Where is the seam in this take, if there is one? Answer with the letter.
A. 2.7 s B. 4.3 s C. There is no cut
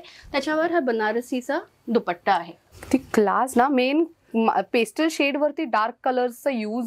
A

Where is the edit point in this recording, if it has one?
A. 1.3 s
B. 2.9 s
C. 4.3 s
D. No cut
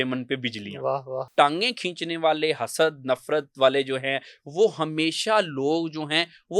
A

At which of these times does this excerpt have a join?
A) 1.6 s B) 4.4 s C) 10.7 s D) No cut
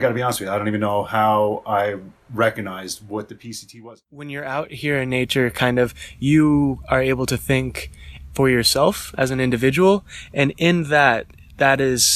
B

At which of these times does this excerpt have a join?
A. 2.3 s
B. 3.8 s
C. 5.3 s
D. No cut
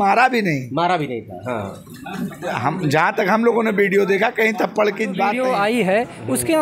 C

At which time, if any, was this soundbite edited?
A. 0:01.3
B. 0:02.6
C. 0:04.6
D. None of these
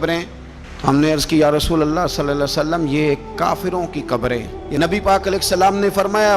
C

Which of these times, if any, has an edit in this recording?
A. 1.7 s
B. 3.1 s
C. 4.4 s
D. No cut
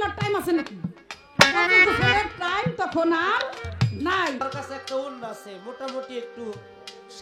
C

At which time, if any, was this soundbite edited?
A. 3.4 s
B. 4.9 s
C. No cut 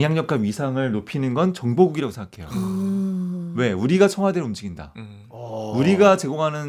C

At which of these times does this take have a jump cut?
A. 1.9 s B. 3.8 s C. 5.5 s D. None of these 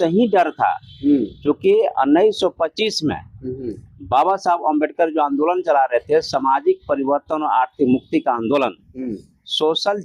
D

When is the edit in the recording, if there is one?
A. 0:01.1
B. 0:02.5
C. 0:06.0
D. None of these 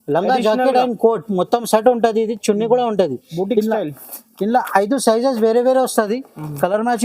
D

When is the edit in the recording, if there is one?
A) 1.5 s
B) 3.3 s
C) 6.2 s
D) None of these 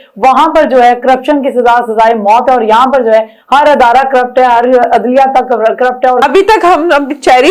C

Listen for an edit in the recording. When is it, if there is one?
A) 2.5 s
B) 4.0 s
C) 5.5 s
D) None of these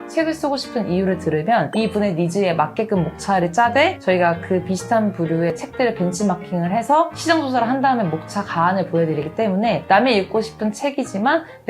C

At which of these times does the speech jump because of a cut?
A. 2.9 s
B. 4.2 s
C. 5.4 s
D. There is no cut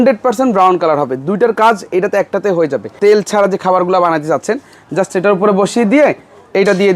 A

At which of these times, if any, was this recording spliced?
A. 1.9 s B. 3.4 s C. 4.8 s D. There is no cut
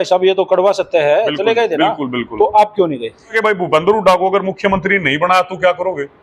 B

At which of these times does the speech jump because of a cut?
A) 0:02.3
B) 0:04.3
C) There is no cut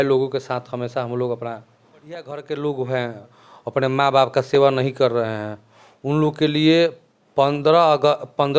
A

